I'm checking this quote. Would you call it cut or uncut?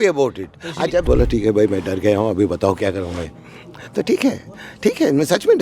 cut